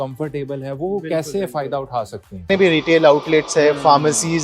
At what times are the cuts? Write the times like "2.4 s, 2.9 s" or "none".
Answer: 2.4 s